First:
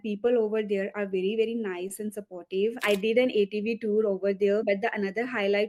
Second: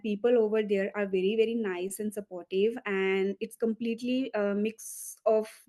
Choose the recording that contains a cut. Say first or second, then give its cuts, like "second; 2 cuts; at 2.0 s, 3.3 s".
first; 2 cuts; at 2.8 s, 4.6 s